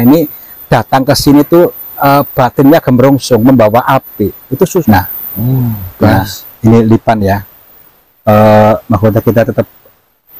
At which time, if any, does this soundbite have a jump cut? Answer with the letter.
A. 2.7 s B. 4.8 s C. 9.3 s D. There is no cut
B